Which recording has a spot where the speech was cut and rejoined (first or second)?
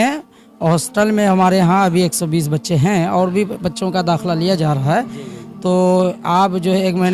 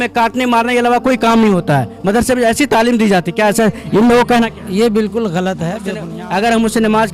second